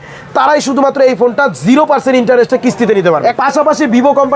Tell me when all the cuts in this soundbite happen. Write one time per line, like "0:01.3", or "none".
0:03.3